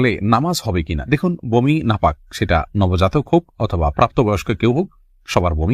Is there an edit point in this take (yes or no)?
no